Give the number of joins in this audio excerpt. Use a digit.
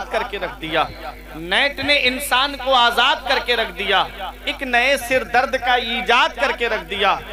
0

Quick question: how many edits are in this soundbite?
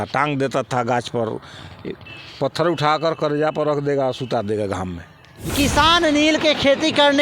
1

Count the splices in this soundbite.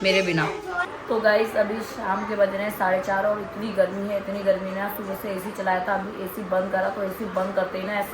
1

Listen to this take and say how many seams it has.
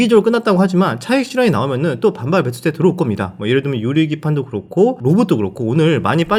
0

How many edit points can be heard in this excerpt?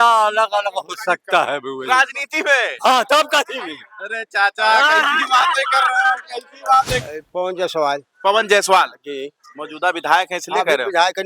1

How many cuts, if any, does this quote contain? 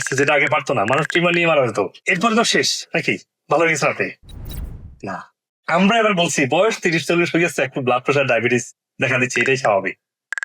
2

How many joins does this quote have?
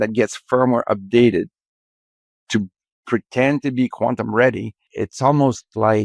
1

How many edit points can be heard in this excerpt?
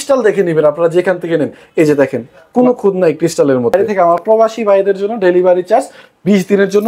1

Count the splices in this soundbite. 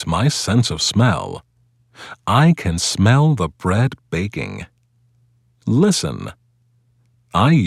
3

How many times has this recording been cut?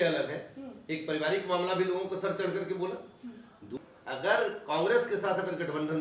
1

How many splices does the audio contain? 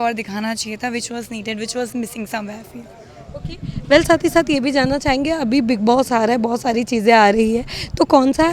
0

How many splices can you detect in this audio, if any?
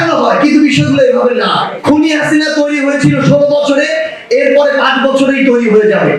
1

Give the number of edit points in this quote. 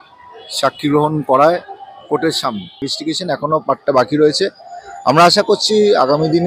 1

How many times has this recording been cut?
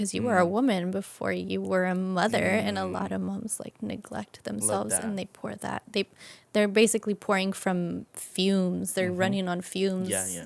0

